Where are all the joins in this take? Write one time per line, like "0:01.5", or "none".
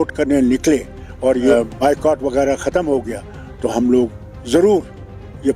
0:01.5